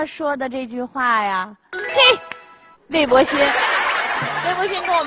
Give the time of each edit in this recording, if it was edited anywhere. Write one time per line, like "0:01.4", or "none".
0:04.0